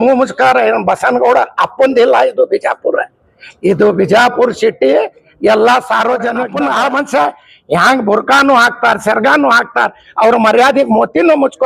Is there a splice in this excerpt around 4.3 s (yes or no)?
no